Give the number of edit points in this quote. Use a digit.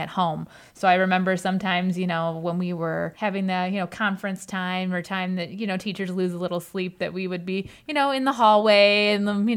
1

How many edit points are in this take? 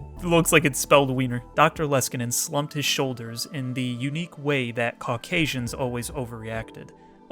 1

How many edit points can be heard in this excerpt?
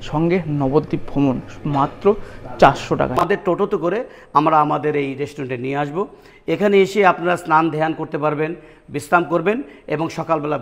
1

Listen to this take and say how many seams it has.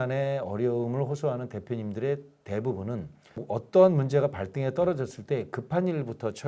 0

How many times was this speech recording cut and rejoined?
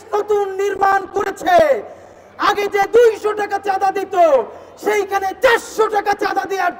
0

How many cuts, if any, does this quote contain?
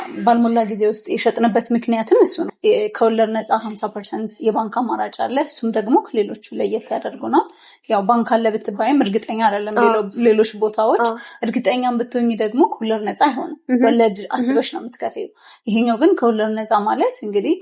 1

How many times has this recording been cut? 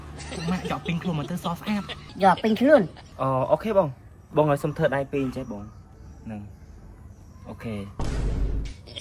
1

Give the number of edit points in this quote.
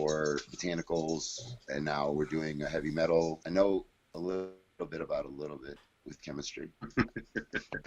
1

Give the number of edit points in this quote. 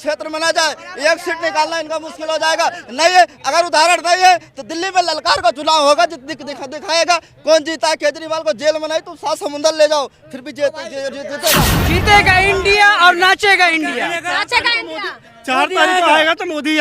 1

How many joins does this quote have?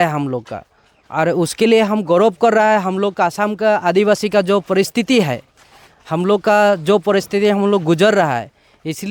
0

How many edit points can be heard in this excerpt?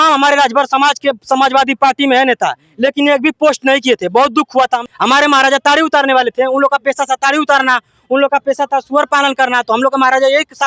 1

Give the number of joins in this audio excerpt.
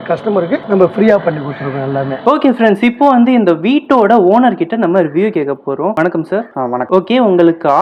0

